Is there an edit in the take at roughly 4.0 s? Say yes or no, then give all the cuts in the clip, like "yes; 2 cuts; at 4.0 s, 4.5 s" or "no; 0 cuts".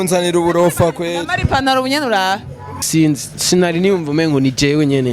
no; 1 cut; at 2.7 s